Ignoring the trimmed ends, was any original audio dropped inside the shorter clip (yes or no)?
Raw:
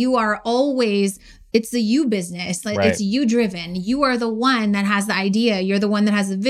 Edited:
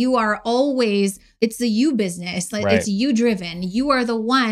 yes